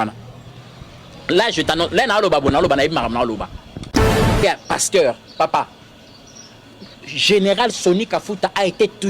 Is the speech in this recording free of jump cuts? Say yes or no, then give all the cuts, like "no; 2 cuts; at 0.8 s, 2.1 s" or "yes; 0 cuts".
no; 1 cut; at 4.4 s